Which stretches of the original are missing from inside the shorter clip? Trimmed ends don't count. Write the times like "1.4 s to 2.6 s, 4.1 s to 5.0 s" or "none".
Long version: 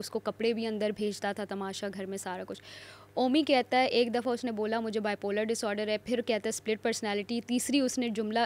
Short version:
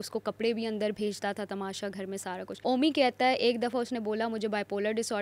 2.5 s to 3.1 s